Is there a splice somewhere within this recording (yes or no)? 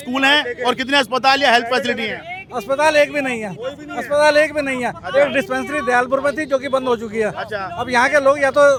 no